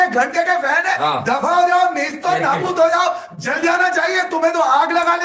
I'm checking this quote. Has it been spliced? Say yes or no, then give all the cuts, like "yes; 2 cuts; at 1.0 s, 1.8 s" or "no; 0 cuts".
no; 0 cuts